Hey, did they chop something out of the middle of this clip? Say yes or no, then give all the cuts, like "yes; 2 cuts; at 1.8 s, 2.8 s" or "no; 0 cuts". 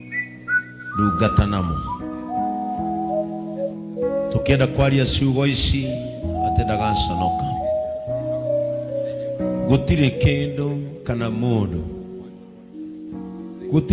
no; 0 cuts